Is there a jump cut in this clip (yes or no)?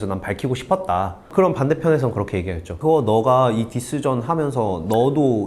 yes